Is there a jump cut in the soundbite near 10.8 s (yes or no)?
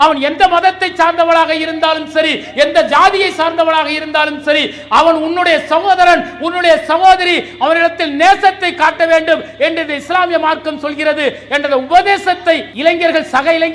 no